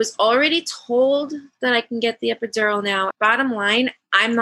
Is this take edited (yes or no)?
yes